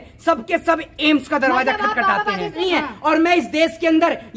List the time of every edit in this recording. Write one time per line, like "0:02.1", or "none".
0:02.5